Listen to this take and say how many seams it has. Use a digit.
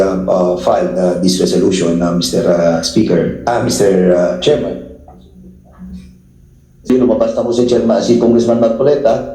1